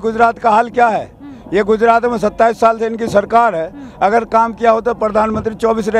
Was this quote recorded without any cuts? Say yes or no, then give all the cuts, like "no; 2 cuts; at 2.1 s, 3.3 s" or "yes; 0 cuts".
yes; 0 cuts